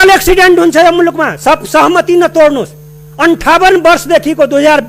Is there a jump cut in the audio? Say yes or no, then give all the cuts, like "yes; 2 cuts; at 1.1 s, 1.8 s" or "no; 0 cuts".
no; 0 cuts